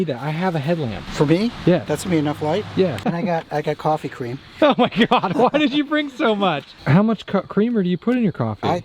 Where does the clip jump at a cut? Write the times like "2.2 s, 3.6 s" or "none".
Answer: 1.0 s, 1.9 s, 3.0 s, 6.7 s